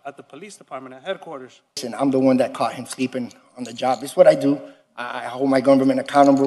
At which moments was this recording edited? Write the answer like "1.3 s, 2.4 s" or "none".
1.9 s

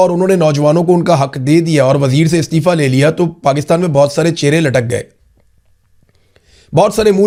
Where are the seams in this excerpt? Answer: none

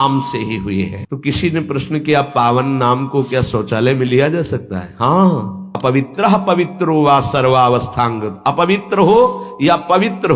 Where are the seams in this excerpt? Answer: 1.0 s, 5.6 s

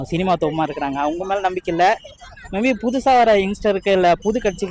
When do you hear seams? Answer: none

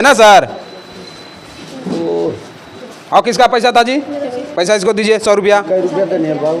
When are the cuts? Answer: none

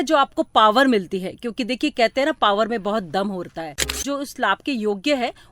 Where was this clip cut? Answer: 4.0 s

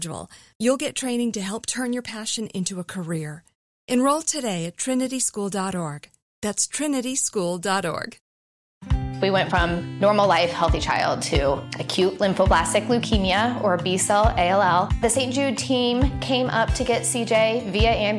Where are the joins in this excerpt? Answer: 8.7 s

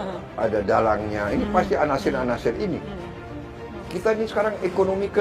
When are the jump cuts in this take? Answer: 3.4 s

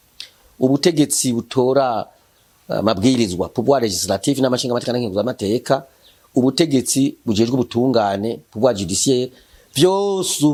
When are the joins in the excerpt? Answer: none

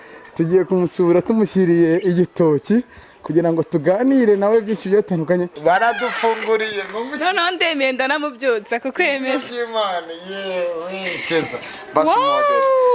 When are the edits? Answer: 5.5 s

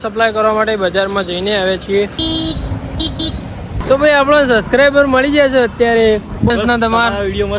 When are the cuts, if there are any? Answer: 2.2 s, 3.7 s, 6.5 s

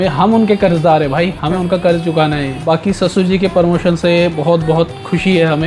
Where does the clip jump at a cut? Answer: 2.6 s

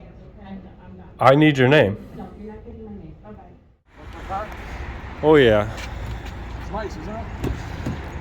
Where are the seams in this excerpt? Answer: 3.9 s

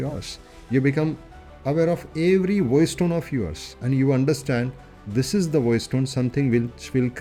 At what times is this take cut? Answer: none

